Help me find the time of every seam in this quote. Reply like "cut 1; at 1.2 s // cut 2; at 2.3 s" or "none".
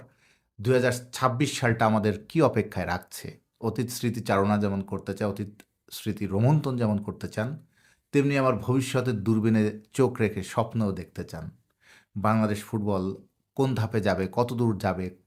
none